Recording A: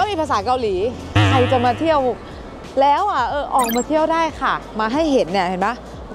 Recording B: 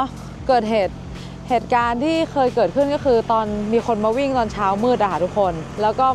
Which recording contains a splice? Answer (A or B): A